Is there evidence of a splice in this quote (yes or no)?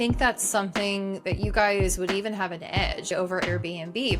yes